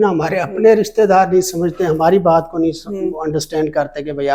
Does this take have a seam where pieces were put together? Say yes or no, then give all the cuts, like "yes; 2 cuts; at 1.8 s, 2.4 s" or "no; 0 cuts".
no; 0 cuts